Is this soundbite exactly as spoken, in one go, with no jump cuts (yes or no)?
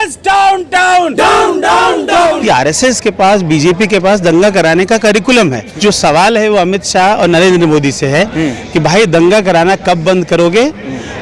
no